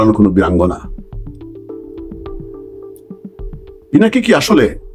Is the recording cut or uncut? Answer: uncut